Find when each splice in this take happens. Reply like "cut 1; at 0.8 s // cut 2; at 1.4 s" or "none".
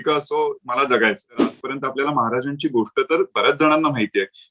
cut 1; at 1.6 s